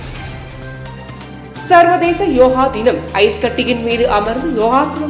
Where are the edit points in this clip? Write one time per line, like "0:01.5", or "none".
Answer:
0:01.0